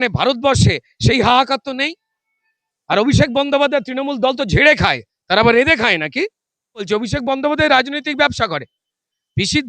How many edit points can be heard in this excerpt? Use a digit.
1